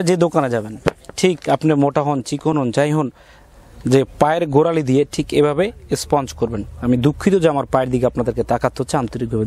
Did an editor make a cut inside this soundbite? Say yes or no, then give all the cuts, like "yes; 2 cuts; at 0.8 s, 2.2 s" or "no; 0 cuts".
no; 0 cuts